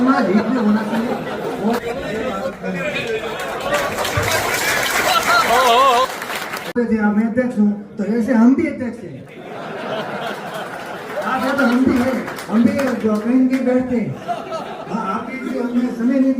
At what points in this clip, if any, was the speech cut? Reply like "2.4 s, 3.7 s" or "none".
6.8 s